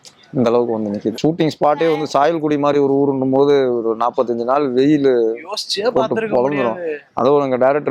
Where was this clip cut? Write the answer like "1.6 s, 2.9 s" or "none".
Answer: 1.2 s